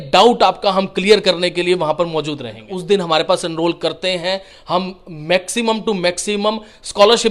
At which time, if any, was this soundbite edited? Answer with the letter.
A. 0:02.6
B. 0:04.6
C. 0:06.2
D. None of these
A